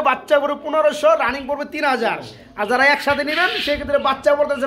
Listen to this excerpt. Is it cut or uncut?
uncut